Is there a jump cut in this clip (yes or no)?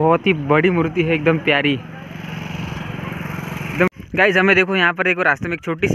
yes